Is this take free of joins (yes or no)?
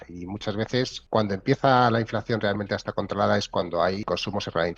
no